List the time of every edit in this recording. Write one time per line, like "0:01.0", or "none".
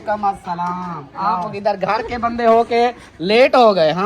0:01.5